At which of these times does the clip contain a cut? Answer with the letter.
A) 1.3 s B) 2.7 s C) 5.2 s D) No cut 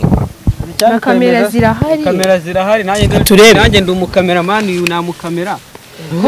D